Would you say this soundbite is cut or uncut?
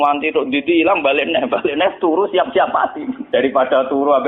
cut